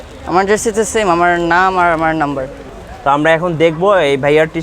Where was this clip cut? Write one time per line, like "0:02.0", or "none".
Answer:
0:02.6